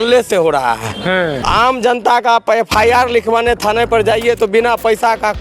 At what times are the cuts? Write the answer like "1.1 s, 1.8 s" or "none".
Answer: 1.4 s